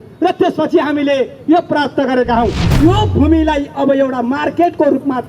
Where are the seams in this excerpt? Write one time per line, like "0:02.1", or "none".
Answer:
0:02.7